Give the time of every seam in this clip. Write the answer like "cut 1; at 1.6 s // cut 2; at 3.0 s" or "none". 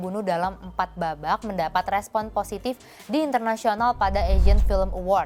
none